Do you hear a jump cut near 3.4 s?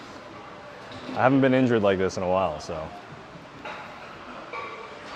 no; 0 cuts

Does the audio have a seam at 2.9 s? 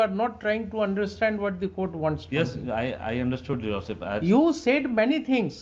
no; 0 cuts

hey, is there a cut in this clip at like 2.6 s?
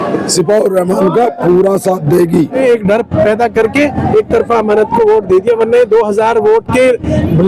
yes; 1 cut; at 2.6 s

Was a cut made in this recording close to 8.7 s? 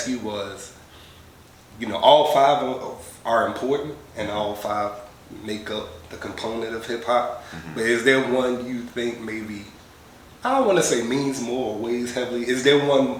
no; 0 cuts

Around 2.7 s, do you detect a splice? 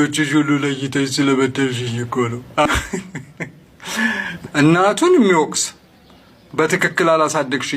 yes; 2 cuts; at 2.7 s, 4.3 s

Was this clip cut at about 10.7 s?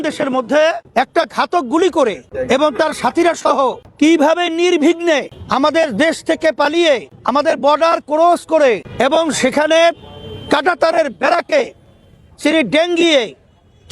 no; 6 cuts; at 0.8 s, 2.3 s, 3.8 s, 5.4 s, 7.1 s, 8.9 s

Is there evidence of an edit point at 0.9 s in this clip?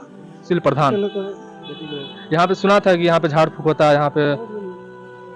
yes; 1 cut; at 0.9 s

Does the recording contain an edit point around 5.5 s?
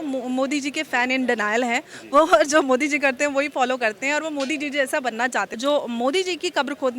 yes; 1 cut; at 5.5 s

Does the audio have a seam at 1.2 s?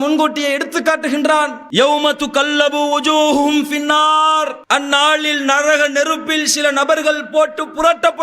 no; 1 cut; at 4.6 s

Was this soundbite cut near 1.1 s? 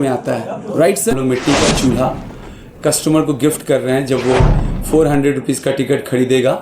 yes; 1 cut; at 1.1 s

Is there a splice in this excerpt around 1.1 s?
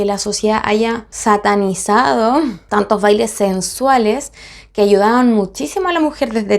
yes; 2 cuts; at 1.1 s, 2.6 s

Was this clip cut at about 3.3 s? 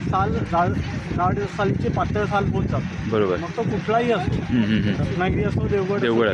no; 0 cuts

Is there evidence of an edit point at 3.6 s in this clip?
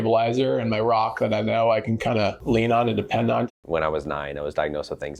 yes; 2 cuts; at 2.4 s, 3.6 s

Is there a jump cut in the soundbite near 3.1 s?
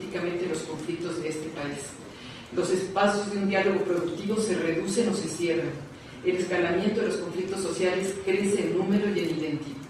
yes; 1 cut; at 3.1 s

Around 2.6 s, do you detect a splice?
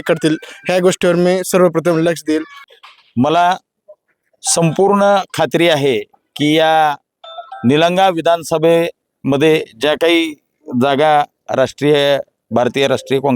yes; 1 cut; at 2.6 s

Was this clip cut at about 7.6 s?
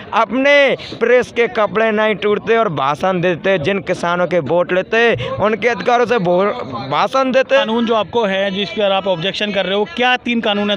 yes; 1 cut; at 7.6 s

